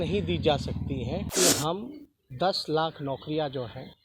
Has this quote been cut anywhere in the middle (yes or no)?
yes